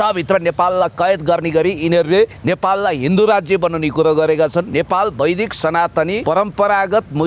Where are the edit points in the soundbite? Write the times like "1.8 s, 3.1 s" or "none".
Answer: 2.4 s, 4.7 s, 6.2 s